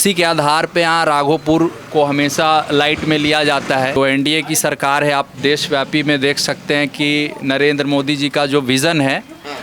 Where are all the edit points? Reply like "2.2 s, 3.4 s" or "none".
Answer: 4.0 s